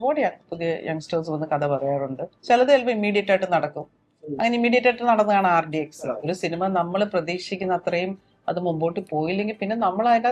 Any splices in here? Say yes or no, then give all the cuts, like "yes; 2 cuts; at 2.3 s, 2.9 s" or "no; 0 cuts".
yes; 2 cuts; at 2.3 s, 6.3 s